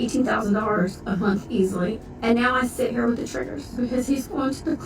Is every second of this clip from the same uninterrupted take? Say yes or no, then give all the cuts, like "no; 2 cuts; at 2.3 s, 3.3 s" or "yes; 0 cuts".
no; 2 cuts; at 2.0 s, 3.8 s